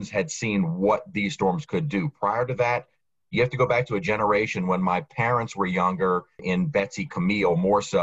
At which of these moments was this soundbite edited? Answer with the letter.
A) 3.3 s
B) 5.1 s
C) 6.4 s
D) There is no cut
C